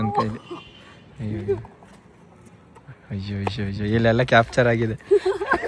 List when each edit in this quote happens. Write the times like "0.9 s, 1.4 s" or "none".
none